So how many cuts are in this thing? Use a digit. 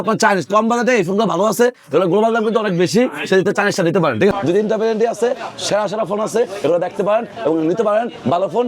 1